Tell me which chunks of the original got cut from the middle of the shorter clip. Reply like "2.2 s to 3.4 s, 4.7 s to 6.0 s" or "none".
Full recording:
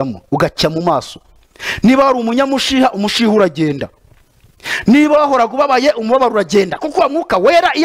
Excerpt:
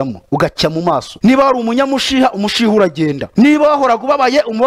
1.1 s to 1.7 s, 3.8 s to 4.7 s